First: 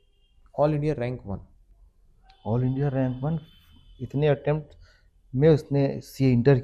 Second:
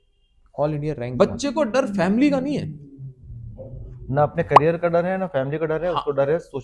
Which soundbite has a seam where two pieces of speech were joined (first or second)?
second